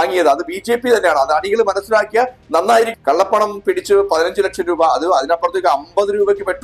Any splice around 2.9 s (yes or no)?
yes